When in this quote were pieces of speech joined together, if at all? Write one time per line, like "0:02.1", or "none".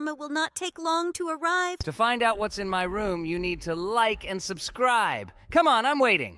0:01.8